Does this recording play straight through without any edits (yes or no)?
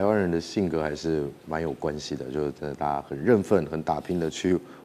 yes